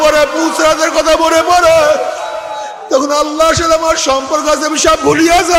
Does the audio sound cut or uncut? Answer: uncut